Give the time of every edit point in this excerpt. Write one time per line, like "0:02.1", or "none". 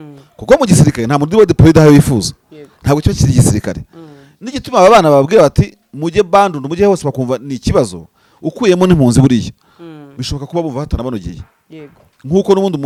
none